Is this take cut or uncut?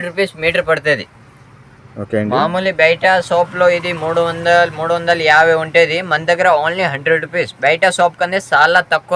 uncut